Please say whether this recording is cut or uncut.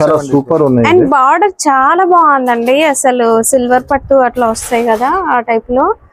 uncut